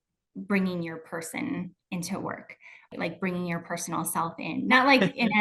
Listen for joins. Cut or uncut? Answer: cut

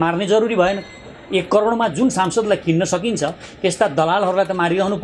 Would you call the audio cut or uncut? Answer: uncut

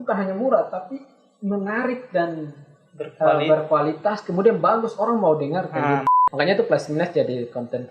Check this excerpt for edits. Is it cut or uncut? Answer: cut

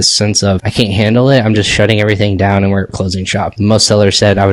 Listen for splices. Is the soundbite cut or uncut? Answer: uncut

